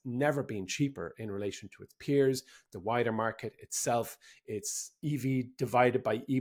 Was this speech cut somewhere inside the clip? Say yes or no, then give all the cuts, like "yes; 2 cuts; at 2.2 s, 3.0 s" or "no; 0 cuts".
no; 0 cuts